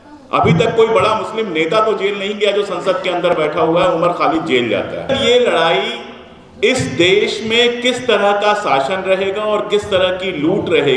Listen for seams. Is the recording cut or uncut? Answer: cut